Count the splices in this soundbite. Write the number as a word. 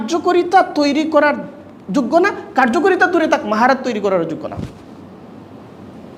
zero